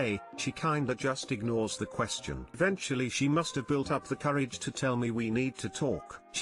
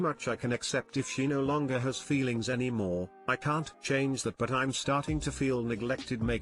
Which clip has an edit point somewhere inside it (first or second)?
first